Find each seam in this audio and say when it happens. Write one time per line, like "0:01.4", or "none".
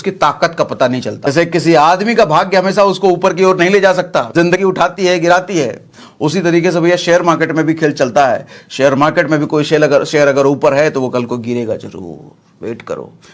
0:01.3
0:04.6